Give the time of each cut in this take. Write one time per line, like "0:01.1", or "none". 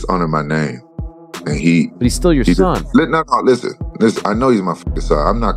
none